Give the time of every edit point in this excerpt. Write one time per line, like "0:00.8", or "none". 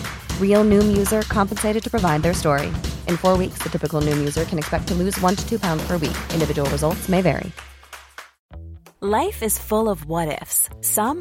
0:08.4

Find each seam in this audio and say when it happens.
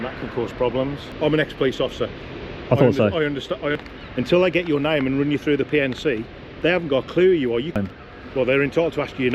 0:01.1
0:03.8
0:07.8

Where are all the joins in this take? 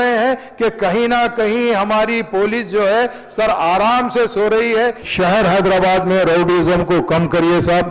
0:05.0

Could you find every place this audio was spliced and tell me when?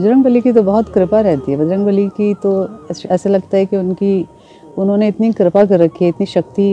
none

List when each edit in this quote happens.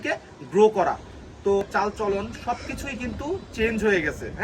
0:01.7

